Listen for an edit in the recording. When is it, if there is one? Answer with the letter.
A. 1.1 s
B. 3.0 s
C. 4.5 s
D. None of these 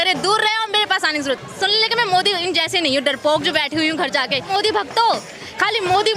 C